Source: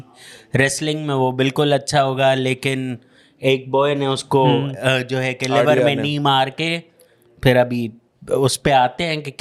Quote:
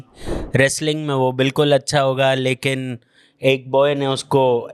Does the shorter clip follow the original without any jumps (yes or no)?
yes